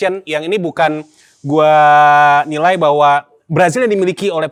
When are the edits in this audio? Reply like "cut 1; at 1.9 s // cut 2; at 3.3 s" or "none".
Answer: none